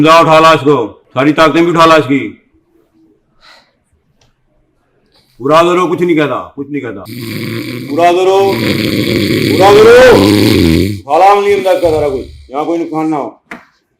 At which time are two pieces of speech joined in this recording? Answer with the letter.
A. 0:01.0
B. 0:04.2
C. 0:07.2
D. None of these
A